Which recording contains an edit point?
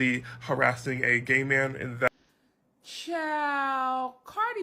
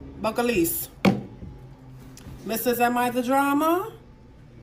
first; 1 cut; at 2.1 s

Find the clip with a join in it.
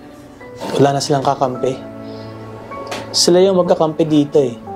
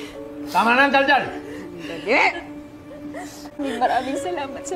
second; 1 cut; at 3.6 s

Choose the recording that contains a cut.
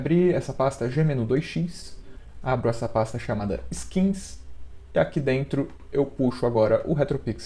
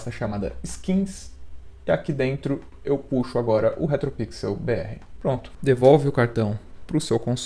second; 1 cut; at 5.5 s

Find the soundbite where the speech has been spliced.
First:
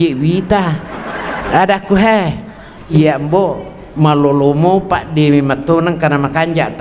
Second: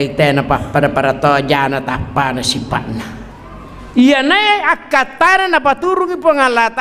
first; 2 cuts; at 1.4 s, 2.9 s

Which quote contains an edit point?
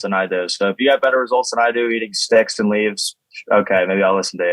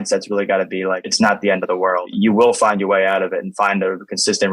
second; 2 cuts; at 1.1 s, 2.1 s

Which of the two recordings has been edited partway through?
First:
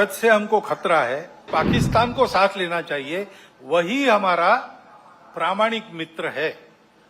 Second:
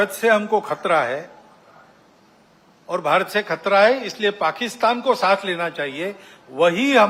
first; 1 cut; at 1.5 s

